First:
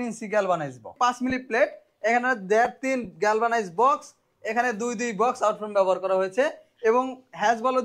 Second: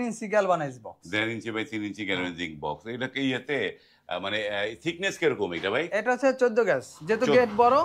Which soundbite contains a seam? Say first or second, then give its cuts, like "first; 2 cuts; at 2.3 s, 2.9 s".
first; 1 cut; at 0.9 s